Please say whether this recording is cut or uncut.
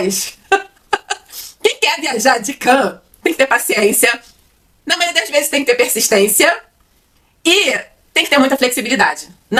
uncut